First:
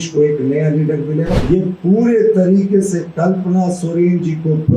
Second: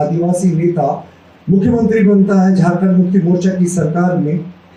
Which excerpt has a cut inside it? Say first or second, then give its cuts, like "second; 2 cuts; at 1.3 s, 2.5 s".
first; 1 cut; at 1.4 s